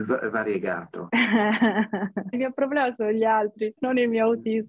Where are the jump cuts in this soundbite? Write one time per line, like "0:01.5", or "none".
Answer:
0:00.9
0:02.3
0:03.8